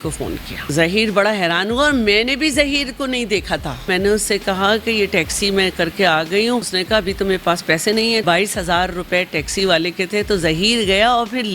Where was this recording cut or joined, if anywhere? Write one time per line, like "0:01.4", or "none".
0:00.7
0:03.9
0:06.7
0:08.2